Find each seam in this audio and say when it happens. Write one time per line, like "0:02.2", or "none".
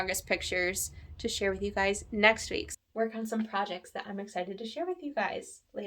0:02.7